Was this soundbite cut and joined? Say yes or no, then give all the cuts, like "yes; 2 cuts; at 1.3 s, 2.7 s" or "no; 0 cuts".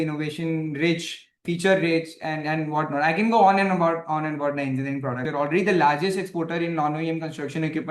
yes; 2 cuts; at 1.4 s, 5.3 s